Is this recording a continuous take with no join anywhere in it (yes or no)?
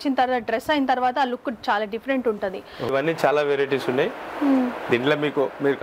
no